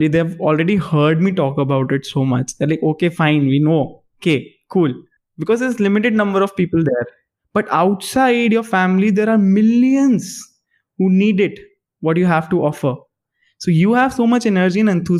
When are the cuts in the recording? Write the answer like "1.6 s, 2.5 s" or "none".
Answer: none